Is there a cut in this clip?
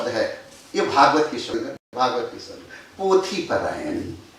yes; 1 cut; at 1.8 s

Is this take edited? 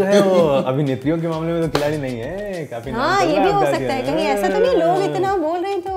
no; 0 cuts

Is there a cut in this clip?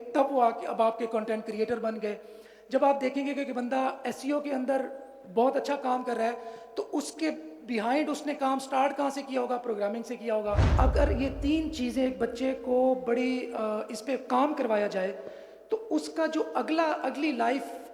yes; 1 cut; at 10.7 s

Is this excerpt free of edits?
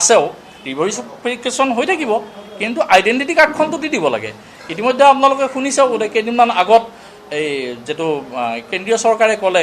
yes; 0 cuts

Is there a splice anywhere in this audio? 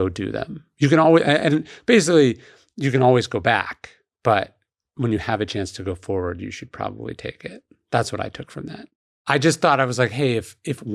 yes; 1 cut; at 9.2 s

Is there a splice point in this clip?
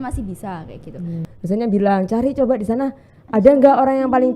yes; 1 cut; at 1.2 s

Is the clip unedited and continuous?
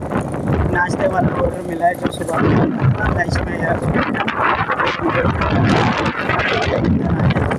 yes; 0 cuts

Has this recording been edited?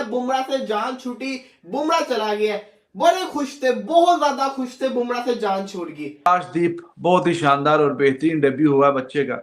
yes; 1 cut; at 6.3 s

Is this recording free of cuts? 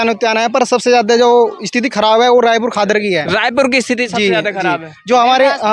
yes; 0 cuts

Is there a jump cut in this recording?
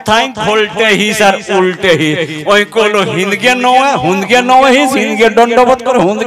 no; 0 cuts

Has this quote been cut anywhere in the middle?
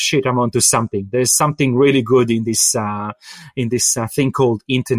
no; 0 cuts

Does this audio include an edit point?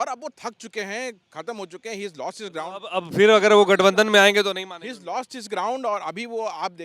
no; 0 cuts

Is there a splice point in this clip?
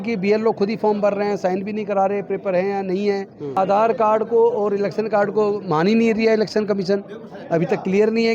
yes; 1 cut; at 3.6 s

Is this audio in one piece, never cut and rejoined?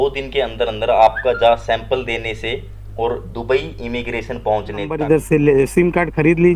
no; 1 cut; at 4.9 s

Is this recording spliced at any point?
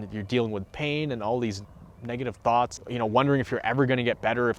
yes; 1 cut; at 2.8 s

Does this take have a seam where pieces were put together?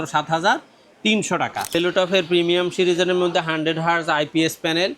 yes; 1 cut; at 1.7 s

